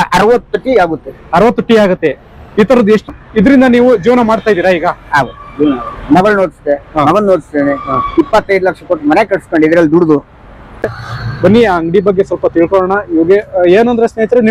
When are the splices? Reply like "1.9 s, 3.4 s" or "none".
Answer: 3.1 s, 10.8 s